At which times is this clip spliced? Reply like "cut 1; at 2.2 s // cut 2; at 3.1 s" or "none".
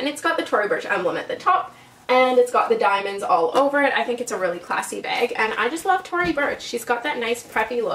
cut 1; at 2.0 s